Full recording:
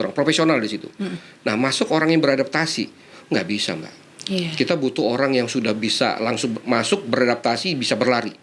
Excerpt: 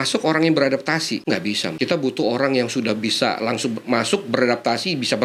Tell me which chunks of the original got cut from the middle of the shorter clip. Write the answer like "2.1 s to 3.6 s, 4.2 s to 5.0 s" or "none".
3.3 s to 4.4 s